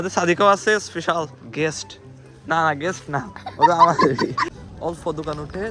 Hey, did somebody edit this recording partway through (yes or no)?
yes